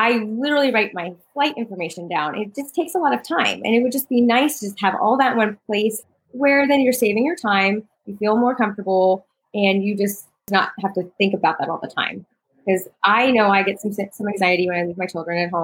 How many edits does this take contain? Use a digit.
2